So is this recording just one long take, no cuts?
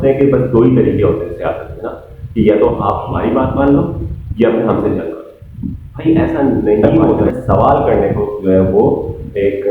no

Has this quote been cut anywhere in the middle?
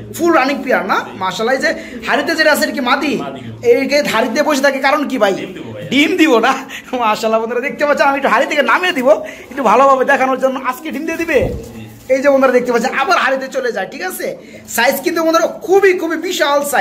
no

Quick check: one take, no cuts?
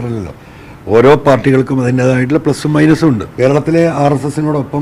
no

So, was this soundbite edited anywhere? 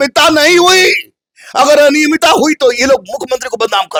no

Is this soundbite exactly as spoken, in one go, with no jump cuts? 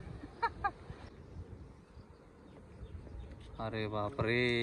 no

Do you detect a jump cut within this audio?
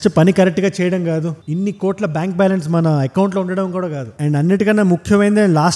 yes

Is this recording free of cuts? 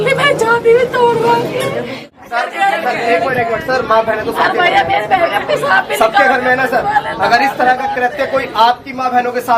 no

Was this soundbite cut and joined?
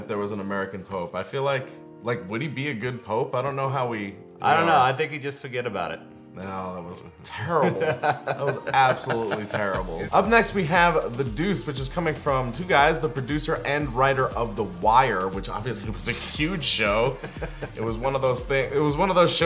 no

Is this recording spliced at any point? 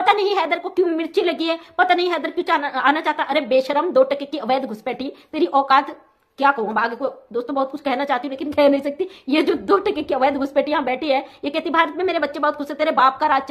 no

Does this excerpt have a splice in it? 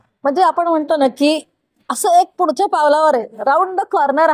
no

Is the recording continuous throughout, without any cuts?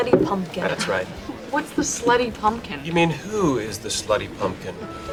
yes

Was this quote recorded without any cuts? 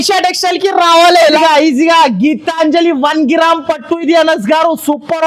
no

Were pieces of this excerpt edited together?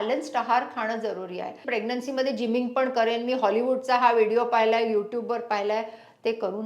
yes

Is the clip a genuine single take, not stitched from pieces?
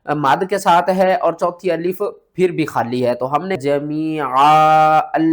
no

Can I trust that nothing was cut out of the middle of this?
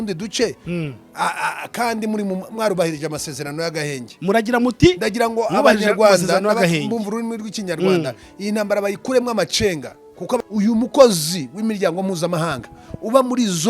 no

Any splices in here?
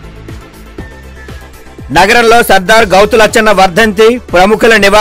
no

